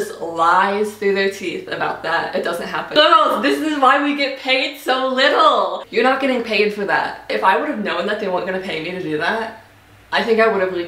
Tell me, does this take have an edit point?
yes; 3 cuts; at 2.9 s, 5.8 s, 7.3 s

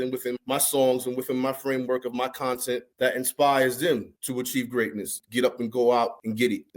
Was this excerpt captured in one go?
no; 1 cut; at 5.2 s

